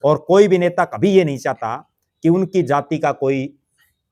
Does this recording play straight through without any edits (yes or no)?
yes